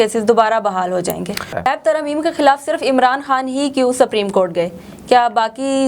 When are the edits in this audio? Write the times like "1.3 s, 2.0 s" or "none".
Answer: 1.5 s